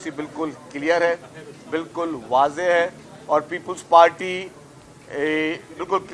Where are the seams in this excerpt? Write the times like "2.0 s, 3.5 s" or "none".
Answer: none